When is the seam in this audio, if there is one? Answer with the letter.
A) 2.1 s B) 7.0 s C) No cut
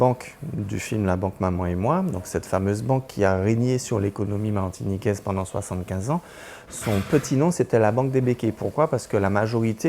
C